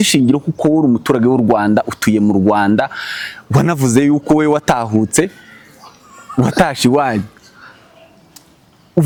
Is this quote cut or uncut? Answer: uncut